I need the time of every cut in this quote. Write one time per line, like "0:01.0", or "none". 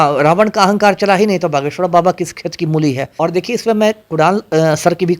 0:03.1